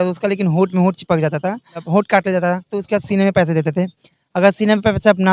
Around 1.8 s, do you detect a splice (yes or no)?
yes